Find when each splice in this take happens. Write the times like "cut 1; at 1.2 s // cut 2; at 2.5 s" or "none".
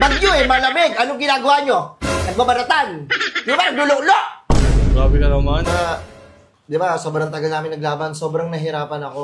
cut 1; at 5.7 s